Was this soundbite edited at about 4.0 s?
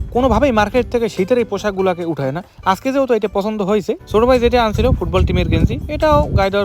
yes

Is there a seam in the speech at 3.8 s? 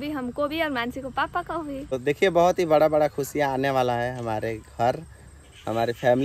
no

